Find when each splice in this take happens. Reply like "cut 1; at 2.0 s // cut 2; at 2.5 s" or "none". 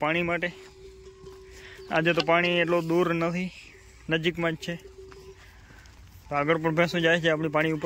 none